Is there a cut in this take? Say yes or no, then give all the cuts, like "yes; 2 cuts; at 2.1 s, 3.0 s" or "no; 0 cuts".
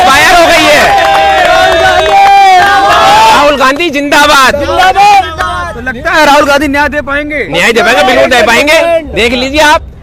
no; 0 cuts